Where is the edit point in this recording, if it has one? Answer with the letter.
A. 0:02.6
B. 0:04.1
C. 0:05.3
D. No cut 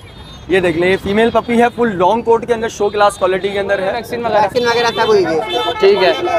B